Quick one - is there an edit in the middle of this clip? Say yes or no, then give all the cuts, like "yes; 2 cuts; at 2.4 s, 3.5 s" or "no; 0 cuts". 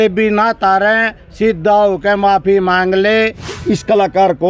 yes; 1 cut; at 3.5 s